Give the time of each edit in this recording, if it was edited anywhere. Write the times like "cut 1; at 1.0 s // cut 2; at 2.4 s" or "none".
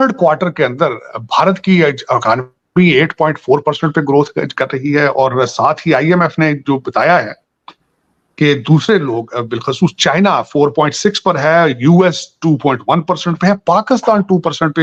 none

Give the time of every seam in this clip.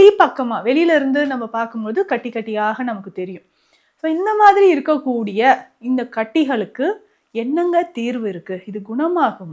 none

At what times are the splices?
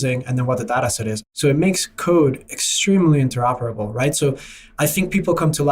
cut 1; at 1.3 s

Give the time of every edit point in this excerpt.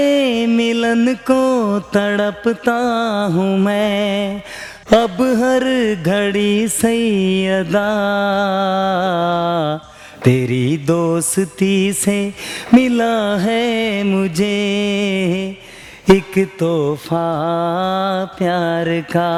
none

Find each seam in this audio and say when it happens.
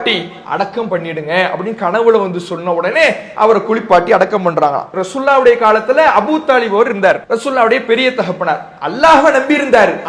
cut 1; at 4.9 s // cut 2; at 7.2 s

